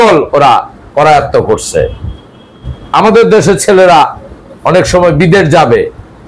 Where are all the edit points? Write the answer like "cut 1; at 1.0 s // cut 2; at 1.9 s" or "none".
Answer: none